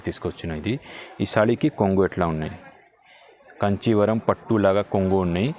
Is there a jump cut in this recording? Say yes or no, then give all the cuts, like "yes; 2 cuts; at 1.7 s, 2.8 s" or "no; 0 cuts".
no; 0 cuts